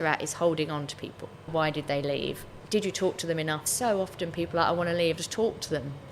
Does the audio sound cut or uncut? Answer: cut